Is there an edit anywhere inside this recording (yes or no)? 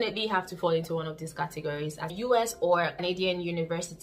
yes